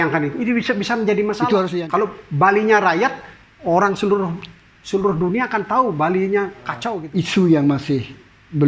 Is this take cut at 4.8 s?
no; 2 cuts; at 1.7 s, 6.9 s

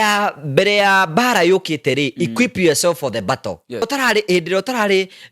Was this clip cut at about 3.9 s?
yes; 1 cut; at 3.9 s

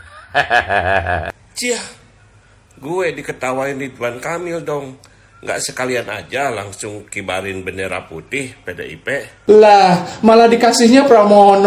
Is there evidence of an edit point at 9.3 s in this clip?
yes; 2 cuts; at 1.5 s, 9.3 s

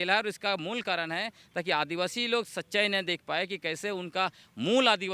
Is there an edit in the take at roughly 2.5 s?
no; 0 cuts

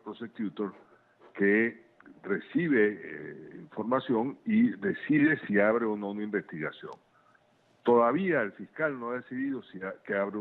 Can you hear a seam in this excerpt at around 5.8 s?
yes; 1 cut; at 5.8 s

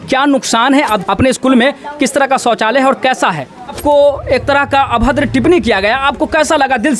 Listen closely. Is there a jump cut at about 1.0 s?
yes; 2 cuts; at 1.0 s, 3.8 s

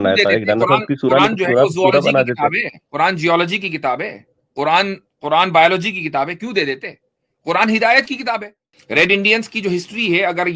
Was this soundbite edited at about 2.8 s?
no; 1 cut; at 8.7 s

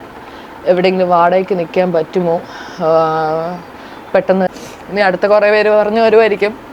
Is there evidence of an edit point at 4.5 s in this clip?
yes; 1 cut; at 4.5 s

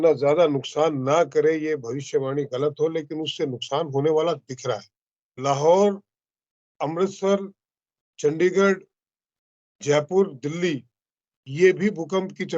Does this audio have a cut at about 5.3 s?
yes; 1 cut; at 5.3 s

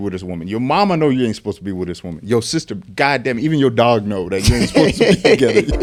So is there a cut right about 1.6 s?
no; 0 cuts

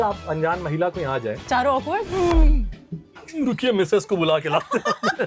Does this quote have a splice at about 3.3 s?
no; 0 cuts

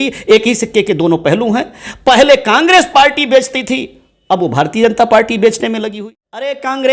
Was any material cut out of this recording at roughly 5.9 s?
yes; 1 cut; at 5.9 s

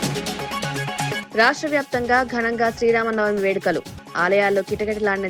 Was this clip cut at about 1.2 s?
yes; 1 cut; at 1.2 s

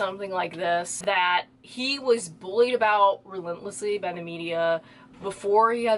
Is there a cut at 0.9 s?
yes; 1 cut; at 0.9 s

